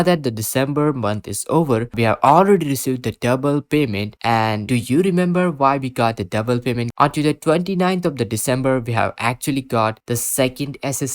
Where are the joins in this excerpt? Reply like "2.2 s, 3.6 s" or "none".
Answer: 1.9 s, 4.6 s, 6.9 s